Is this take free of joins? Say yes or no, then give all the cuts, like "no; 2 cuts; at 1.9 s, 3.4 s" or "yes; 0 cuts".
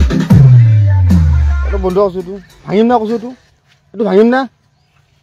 yes; 0 cuts